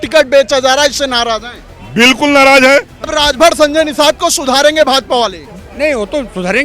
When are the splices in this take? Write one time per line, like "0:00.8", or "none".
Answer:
0:03.0